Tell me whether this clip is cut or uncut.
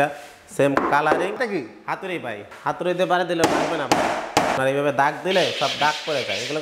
cut